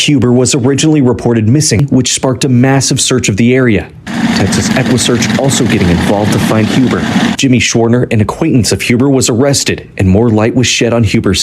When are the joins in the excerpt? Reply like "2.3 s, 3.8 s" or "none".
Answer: 1.8 s, 7.3 s